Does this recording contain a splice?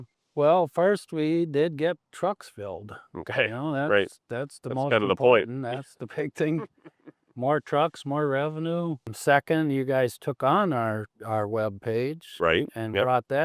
yes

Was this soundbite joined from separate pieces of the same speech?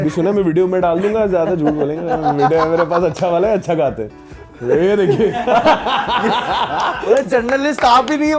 no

